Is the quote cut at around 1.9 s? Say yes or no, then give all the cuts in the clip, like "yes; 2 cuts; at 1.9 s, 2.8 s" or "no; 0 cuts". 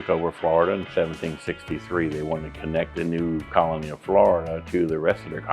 no; 1 cut; at 3.1 s